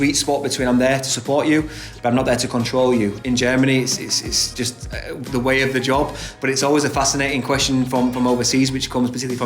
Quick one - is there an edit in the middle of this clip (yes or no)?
yes